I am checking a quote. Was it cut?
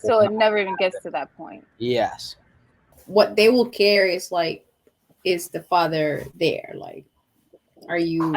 yes; 1 cut; at 3.0 s

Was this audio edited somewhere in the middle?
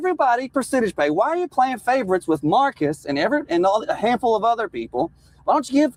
no; 0 cuts

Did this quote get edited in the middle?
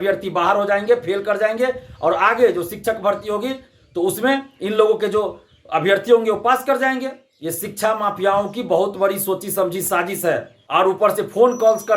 yes; 1 cut; at 10.5 s

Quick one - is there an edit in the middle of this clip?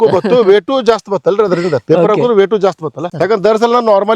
yes; 1 cut; at 3.1 s

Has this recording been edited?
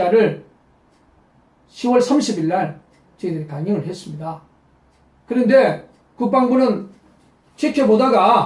no; 0 cuts

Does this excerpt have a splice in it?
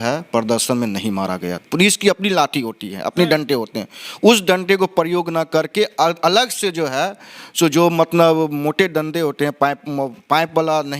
yes; 1 cut; at 1.6 s

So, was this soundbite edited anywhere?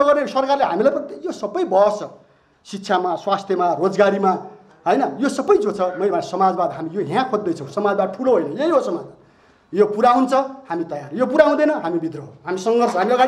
no; 0 cuts

